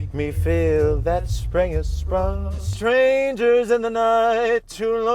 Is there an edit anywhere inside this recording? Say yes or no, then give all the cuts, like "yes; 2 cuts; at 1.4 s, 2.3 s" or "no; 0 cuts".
yes; 1 cut; at 2.7 s